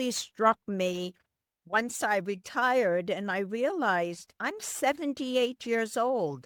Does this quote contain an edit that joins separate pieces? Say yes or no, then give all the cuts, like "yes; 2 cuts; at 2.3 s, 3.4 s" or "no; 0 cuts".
no; 0 cuts